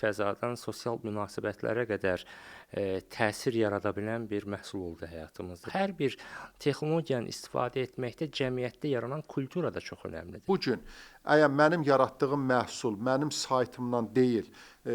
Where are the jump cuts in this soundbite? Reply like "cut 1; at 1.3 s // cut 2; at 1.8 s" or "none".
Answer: cut 1; at 5.6 s // cut 2; at 10.4 s